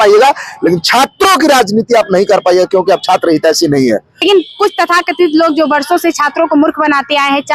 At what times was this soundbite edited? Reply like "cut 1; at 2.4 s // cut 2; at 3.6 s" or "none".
cut 1; at 4.2 s